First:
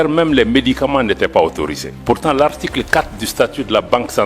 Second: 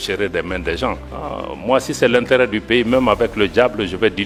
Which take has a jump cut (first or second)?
first